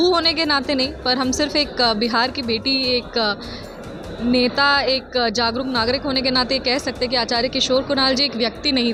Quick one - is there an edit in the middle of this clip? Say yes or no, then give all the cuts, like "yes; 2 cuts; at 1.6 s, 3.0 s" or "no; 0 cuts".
no; 0 cuts